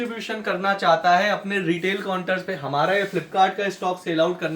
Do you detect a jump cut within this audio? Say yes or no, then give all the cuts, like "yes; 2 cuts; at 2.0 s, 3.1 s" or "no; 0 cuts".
no; 0 cuts